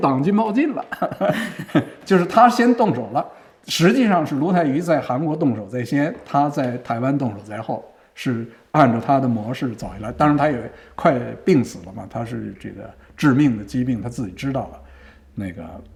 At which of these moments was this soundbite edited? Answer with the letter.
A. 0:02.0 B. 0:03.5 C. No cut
C